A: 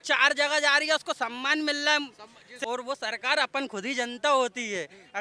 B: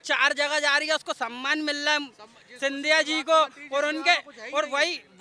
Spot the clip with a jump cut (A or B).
A